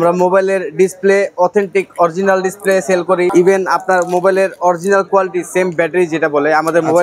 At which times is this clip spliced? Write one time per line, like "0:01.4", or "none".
0:03.3